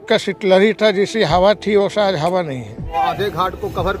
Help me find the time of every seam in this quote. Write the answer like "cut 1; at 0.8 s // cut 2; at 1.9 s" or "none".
cut 1; at 2.9 s